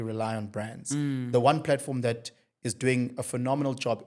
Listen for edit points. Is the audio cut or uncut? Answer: uncut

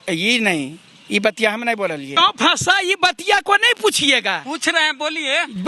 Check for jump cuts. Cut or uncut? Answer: cut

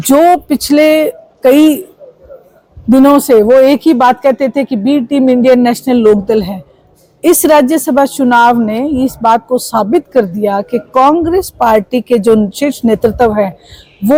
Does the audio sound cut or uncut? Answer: uncut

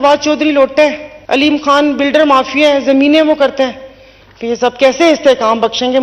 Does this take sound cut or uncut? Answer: cut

